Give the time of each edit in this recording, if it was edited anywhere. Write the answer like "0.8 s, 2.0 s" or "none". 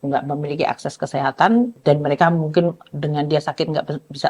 1.8 s